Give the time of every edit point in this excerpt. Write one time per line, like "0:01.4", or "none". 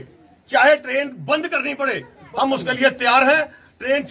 none